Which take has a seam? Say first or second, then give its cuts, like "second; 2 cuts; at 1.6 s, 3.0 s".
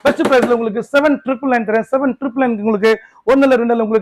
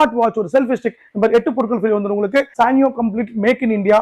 second; 1 cut; at 2.5 s